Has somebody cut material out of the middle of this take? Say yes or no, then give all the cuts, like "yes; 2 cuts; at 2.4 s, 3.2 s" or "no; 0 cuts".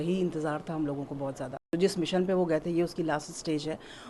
yes; 1 cut; at 1.7 s